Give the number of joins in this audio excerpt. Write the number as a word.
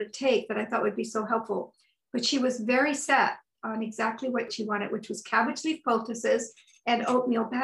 one